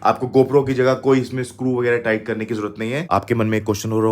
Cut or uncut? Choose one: cut